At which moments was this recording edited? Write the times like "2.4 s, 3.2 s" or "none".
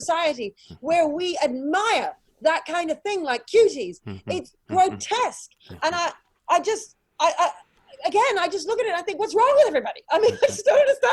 none